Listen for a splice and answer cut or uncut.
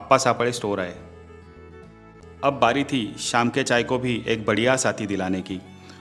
cut